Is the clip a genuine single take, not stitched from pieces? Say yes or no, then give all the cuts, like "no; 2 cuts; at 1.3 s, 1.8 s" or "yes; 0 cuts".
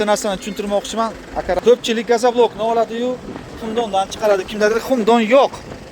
no; 1 cut; at 1.6 s